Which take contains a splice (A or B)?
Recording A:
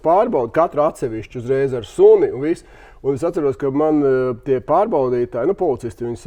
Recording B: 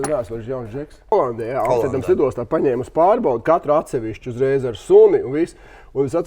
B